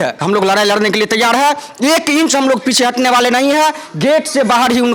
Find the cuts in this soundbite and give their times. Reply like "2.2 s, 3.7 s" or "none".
none